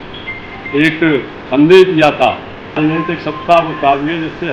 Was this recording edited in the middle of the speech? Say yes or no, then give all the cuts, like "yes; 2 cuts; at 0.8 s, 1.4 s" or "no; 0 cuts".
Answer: yes; 1 cut; at 2.8 s